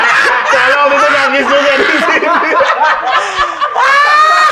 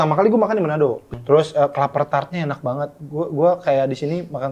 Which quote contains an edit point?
second; 1 cut; at 1.1 s

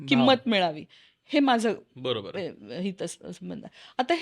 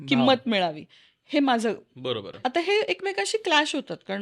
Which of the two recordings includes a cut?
second; 1 cut; at 2.3 s

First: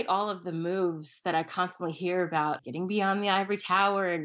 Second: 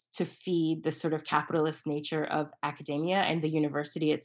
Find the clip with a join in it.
first; 1 cut; at 2.6 s

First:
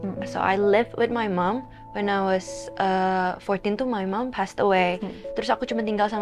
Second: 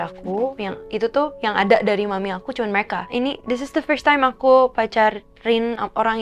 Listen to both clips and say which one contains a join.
second; 1 cut; at 3.0 s

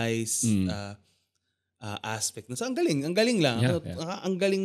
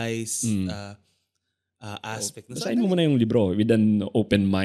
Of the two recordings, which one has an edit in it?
second; 1 cut; at 2.5 s

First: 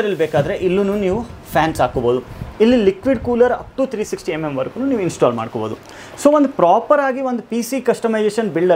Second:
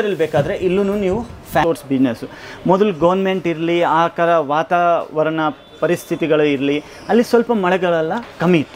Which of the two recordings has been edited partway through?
second; 1 cut; at 1.6 s

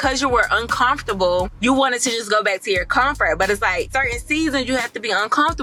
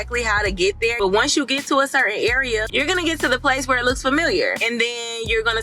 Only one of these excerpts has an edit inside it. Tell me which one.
second; 2 cuts; at 1.0 s, 2.7 s

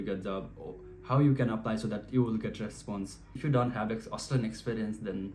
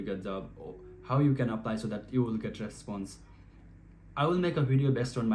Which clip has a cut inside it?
first; 1 cut; at 3.3 s

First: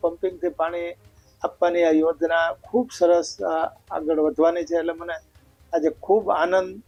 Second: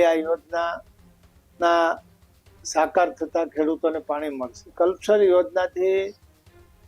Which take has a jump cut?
second; 1 cut; at 4.7 s

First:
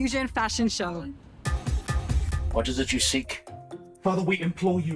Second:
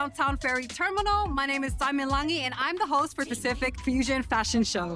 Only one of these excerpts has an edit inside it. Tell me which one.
first; 1 cut; at 2.3 s

